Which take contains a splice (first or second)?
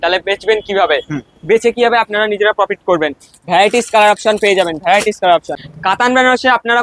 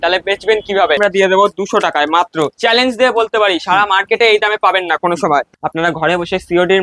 second